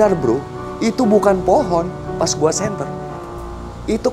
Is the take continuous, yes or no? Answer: yes